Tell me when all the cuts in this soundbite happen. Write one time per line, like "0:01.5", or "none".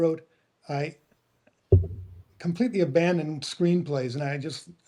none